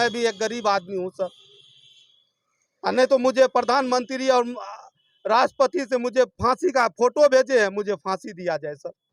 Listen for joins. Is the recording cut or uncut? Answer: uncut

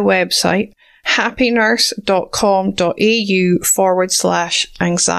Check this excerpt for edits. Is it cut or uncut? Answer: uncut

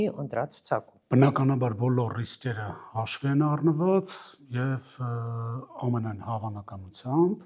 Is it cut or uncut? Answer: uncut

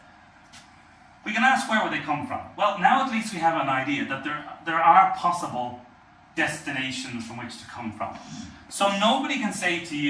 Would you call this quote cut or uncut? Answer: cut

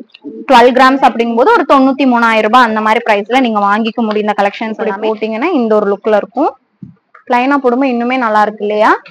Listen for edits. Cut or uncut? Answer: cut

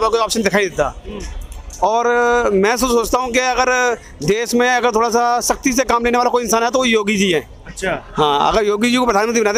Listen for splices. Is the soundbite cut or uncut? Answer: uncut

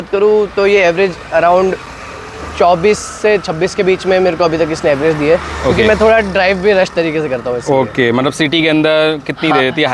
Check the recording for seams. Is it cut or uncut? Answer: uncut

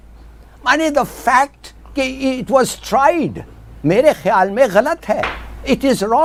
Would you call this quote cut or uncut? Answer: uncut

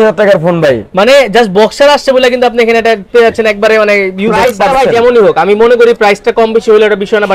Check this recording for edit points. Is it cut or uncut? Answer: cut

